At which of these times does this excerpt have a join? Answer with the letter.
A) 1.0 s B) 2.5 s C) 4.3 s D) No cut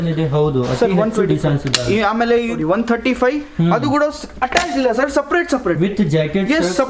B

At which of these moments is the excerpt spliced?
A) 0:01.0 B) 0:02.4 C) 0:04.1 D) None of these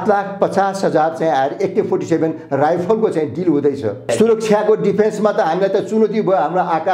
C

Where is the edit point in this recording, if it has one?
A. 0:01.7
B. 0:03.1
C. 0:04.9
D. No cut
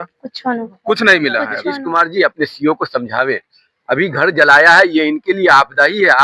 A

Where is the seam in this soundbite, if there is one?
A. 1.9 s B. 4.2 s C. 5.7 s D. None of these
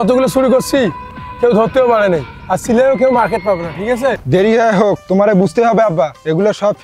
B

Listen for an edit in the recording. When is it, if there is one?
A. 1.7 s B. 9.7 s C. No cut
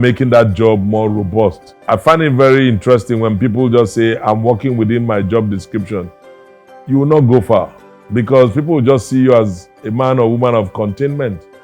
A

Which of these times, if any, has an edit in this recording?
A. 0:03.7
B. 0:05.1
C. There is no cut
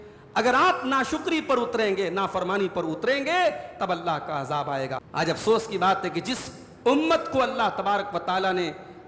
B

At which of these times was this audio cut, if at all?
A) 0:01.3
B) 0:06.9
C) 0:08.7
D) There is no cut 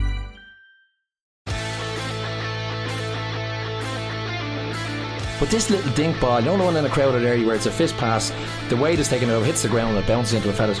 A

